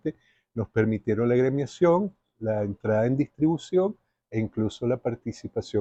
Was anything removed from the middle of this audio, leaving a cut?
no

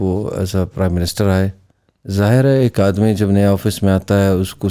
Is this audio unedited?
yes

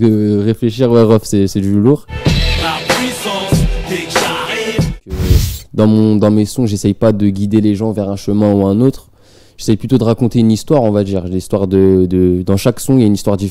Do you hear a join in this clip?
yes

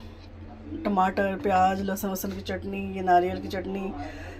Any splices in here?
no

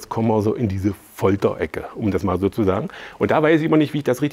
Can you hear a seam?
no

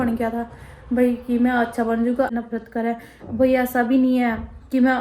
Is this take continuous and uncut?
no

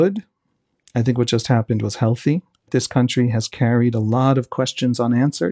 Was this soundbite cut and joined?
yes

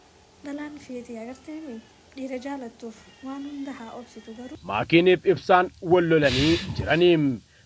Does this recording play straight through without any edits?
no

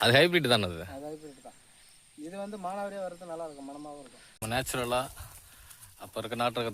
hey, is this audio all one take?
no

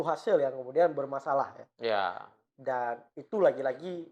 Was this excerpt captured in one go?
yes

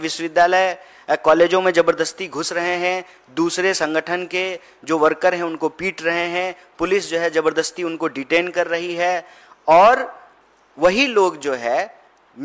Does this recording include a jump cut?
no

